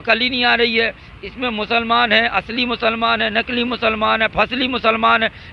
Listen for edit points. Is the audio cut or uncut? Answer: uncut